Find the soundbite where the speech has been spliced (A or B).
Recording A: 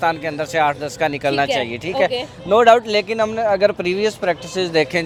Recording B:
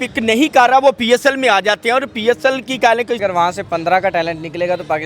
B